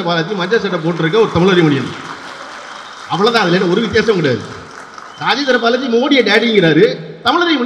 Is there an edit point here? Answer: no; 0 cuts

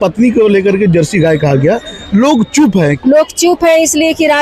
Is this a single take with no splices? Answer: no; 1 cut; at 3.0 s

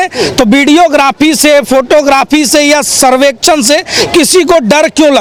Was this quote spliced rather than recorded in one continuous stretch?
no; 0 cuts

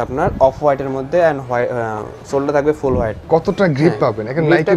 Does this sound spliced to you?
no; 0 cuts

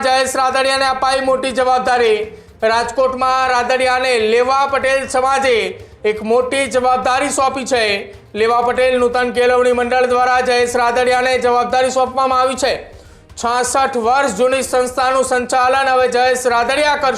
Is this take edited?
no; 0 cuts

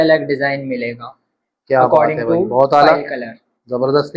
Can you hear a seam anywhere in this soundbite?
no; 0 cuts

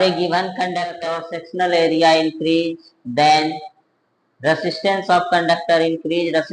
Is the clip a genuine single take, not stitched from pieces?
no; 1 cut; at 1.0 s

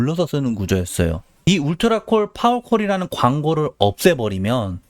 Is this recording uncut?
no; 1 cut; at 1.5 s

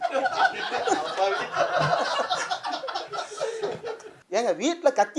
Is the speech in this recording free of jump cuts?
no; 1 cut; at 4.1 s

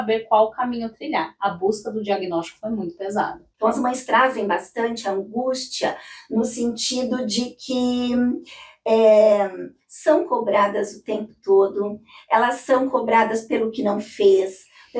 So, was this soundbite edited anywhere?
yes; 1 cut; at 3.4 s

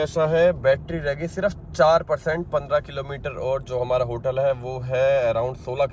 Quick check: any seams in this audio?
no; 0 cuts

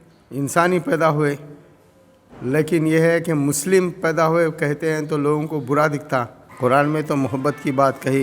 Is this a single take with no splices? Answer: no; 1 cut; at 6.4 s

